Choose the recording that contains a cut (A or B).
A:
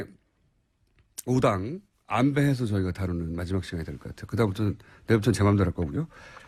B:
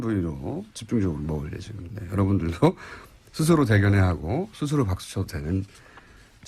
B